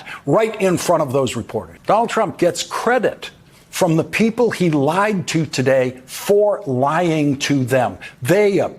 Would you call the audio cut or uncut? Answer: cut